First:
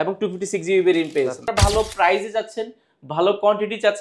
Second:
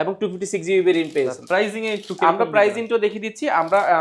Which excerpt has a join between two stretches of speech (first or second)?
first